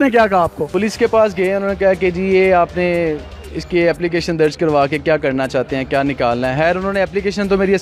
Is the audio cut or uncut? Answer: uncut